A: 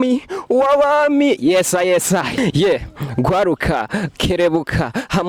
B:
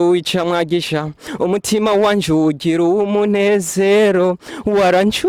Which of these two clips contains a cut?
A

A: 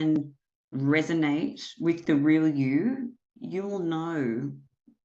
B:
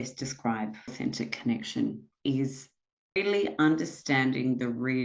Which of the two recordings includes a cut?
B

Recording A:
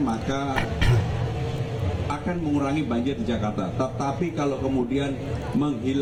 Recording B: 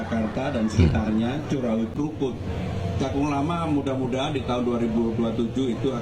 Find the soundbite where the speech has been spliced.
B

